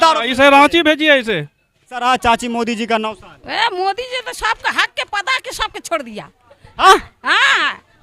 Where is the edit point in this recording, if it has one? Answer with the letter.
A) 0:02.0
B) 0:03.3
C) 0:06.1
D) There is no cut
A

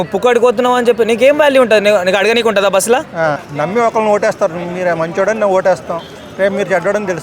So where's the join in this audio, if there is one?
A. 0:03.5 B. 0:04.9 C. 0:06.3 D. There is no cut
A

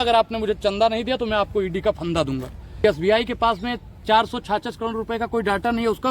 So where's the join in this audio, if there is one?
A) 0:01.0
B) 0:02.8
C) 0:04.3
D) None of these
B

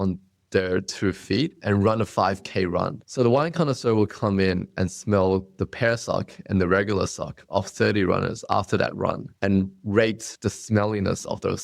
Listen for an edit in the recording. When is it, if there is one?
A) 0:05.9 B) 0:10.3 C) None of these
B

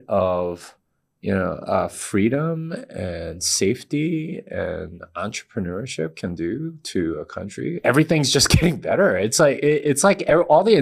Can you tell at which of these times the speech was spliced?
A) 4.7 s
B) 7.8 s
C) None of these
B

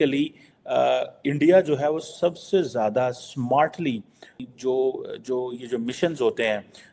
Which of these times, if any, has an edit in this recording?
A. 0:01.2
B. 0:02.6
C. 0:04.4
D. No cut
C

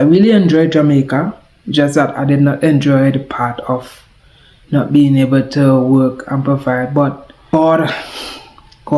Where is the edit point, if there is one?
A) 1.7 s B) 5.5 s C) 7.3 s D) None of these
C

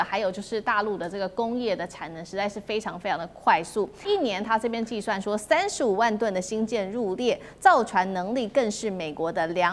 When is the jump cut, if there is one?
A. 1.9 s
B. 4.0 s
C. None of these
B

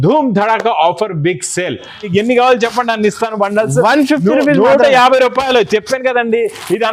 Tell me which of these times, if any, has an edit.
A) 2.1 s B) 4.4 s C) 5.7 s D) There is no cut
A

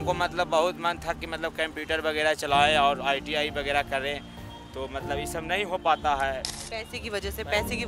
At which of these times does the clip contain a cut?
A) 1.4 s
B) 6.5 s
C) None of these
B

